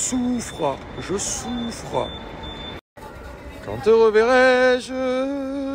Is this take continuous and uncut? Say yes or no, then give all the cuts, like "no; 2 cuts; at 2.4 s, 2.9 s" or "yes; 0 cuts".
yes; 0 cuts